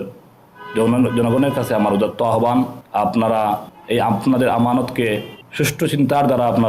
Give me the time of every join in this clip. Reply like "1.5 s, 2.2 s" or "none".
2.8 s, 3.7 s, 5.4 s